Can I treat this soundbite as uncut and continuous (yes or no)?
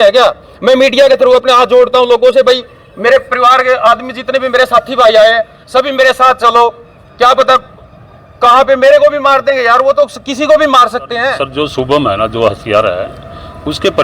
no